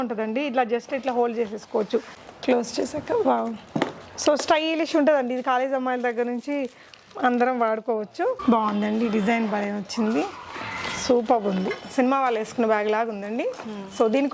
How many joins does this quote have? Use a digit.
2